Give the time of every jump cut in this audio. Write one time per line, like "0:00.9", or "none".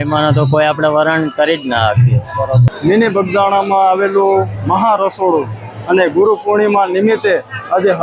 0:02.7